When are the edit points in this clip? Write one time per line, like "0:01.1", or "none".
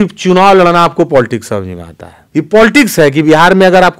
0:02.2